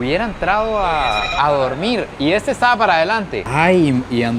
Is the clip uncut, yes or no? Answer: no